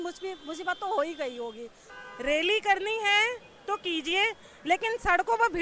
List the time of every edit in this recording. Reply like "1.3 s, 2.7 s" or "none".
1.8 s